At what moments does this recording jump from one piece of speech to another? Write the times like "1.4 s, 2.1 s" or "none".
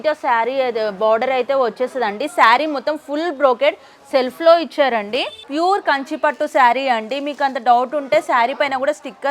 5.4 s